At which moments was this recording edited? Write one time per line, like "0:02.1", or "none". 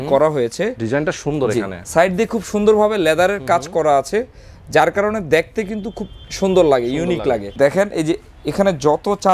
0:01.8
0:07.5